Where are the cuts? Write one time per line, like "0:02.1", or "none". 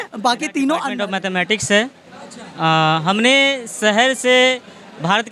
0:01.0